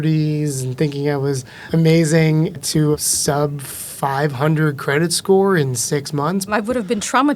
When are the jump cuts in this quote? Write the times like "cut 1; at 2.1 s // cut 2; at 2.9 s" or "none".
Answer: cut 1; at 1.5 s // cut 2; at 2.9 s // cut 3; at 6.5 s